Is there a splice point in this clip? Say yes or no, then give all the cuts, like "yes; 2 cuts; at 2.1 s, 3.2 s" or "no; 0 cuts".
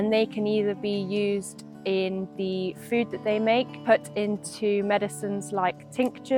no; 0 cuts